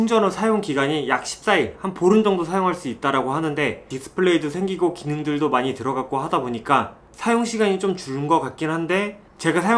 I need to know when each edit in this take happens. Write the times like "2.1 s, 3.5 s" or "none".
3.9 s